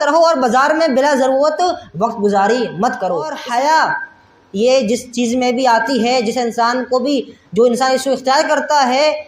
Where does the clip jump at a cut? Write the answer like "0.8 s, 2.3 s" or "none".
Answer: 3.4 s